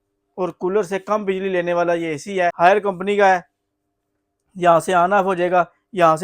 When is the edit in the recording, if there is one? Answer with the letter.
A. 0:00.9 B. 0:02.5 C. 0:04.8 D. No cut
B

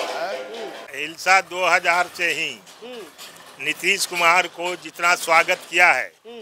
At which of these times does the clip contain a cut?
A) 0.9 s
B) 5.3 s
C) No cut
A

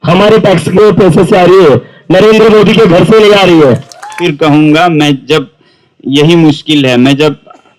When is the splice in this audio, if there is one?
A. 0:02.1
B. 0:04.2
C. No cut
B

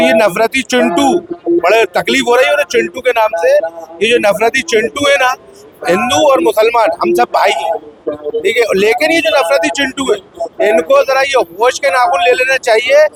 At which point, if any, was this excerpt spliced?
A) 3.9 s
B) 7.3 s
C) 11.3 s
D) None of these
D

